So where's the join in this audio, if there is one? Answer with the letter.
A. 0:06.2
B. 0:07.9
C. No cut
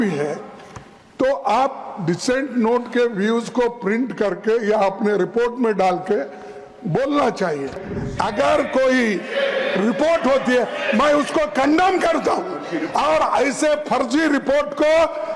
B